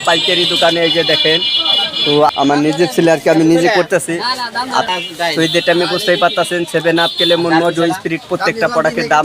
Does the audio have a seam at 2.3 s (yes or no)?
yes